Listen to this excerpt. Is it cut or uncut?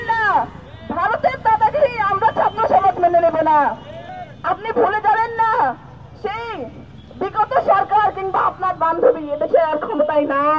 uncut